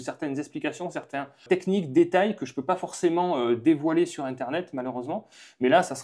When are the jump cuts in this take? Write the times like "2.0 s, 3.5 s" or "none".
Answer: 1.4 s